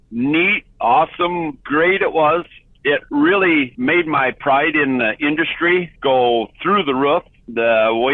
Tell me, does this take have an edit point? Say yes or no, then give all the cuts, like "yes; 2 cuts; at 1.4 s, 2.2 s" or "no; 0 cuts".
no; 0 cuts